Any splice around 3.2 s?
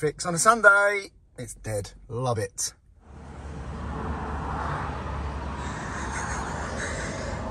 yes; 1 cut; at 3.2 s

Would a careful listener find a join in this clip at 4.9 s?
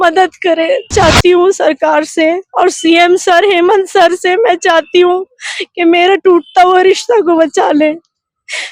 no; 1 cut; at 0.9 s

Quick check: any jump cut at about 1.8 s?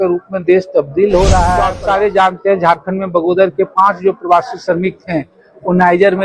yes; 1 cut; at 1.8 s

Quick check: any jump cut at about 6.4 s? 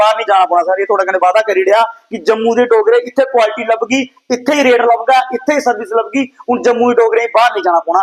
no; 0 cuts

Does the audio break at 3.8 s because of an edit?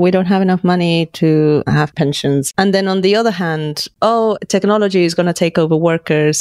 yes; 2 cuts; at 2.1 s, 3.8 s

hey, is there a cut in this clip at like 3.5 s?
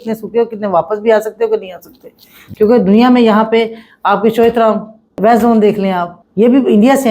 no; 2 cuts; at 5.2 s, 6.2 s

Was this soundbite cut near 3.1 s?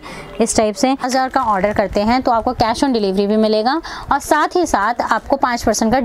no; 1 cut; at 1.0 s

